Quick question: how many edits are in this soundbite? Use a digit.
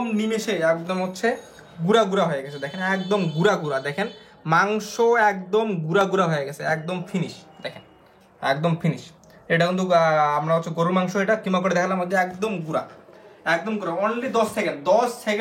0